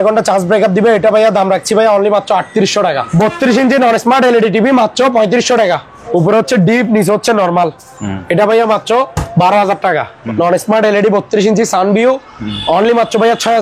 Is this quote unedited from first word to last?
no; 3 cuts; at 3.1 s, 5.9 s, 10.2 s

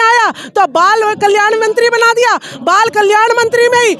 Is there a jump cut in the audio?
no; 0 cuts

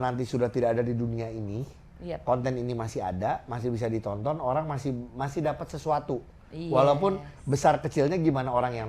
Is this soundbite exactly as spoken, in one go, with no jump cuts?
yes; 0 cuts

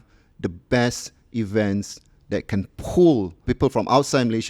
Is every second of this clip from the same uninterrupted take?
no; 1 cut; at 3.4 s

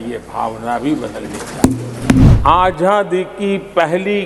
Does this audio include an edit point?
yes; 1 cut; at 2.3 s

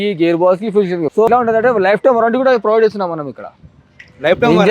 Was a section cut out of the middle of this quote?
yes; 1 cut; at 1.1 s

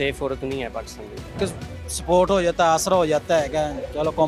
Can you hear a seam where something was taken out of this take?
yes; 1 cut; at 1.4 s

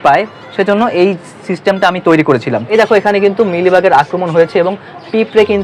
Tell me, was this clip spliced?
yes; 1 cut; at 2.6 s

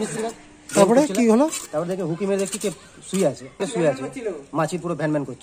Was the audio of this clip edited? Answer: yes; 1 cut; at 3.7 s

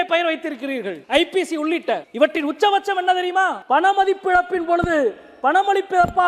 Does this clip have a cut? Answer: yes; 3 cuts; at 1.0 s, 2.1 s, 3.6 s

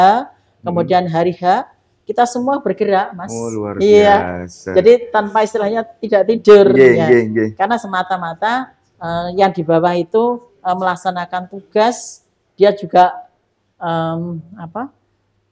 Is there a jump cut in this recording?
no; 0 cuts

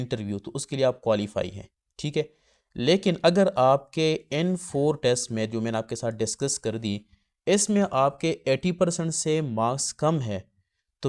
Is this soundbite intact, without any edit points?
yes; 0 cuts

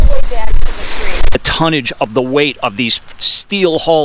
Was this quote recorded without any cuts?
no; 1 cut; at 1.3 s

